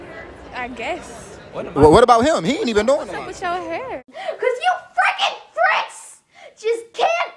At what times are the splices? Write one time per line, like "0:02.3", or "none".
none

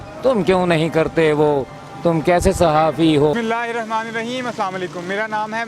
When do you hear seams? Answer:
0:03.3

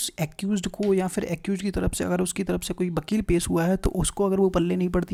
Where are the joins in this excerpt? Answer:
none

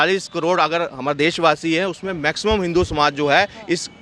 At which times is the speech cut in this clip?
none

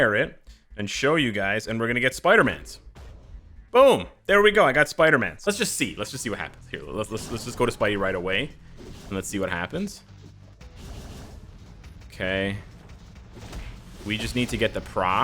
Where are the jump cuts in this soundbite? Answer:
0:05.3

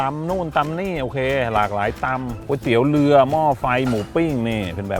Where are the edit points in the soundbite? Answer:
none

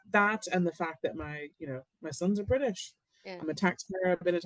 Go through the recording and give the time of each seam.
0:03.1

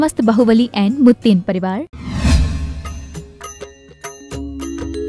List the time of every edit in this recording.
0:02.0

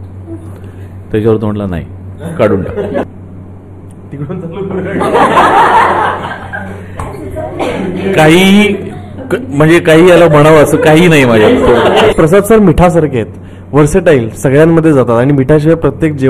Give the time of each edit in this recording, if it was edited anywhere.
0:03.0
0:12.1

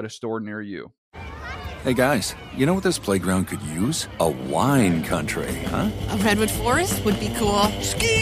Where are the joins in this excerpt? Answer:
0:00.9

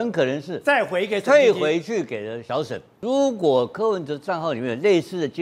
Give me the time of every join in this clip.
0:02.9

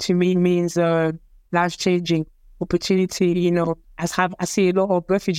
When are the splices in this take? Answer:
0:03.9

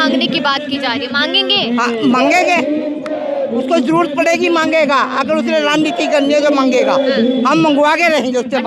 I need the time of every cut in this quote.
none

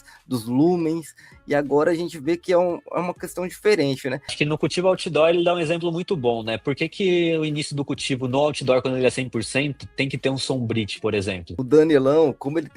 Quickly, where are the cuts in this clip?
0:04.2
0:11.5

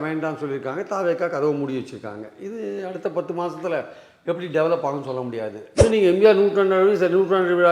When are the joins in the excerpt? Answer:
0:05.8

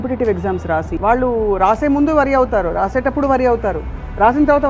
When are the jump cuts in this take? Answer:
0:00.9

